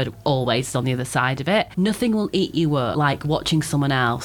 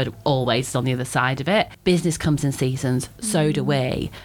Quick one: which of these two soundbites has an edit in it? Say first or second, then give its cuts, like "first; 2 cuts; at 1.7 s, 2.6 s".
first; 2 cuts; at 1.7 s, 2.9 s